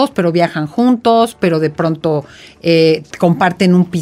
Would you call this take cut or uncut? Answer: uncut